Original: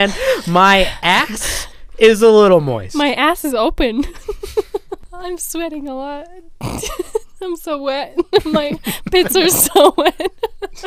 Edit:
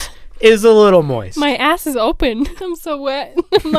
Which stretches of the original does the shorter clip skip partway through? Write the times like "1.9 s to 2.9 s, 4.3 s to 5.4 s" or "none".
4.1 s to 7.4 s